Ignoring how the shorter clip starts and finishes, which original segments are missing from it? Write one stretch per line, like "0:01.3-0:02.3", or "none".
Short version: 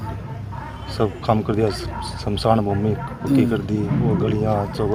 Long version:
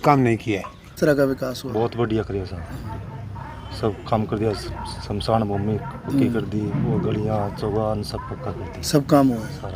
none